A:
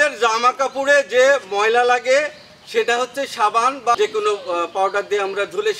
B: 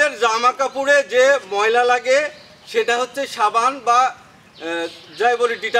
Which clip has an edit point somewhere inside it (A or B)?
A